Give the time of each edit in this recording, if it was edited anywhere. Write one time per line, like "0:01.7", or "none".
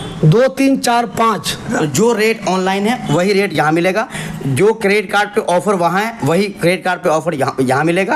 0:01.7